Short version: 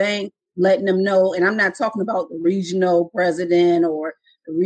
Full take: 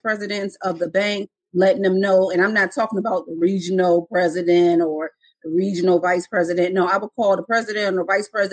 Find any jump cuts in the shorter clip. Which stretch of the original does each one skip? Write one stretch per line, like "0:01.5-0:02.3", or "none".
none